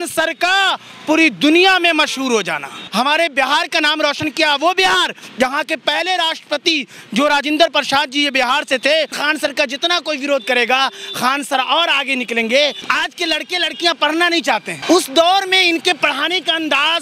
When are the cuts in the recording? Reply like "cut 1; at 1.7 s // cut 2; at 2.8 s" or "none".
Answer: cut 1; at 2.8 s // cut 2; at 9.2 s // cut 3; at 12.8 s // cut 4; at 14.7 s